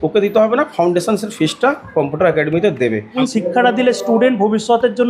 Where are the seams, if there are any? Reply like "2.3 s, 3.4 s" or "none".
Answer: 3.1 s